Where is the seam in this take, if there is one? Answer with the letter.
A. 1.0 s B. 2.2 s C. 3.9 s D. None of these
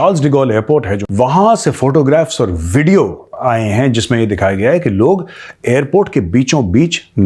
A